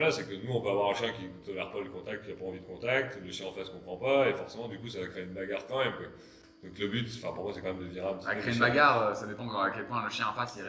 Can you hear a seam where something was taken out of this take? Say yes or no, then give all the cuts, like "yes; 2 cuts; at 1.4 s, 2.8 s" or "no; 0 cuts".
no; 0 cuts